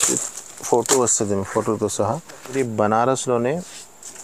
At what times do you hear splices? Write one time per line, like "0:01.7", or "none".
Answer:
0:02.5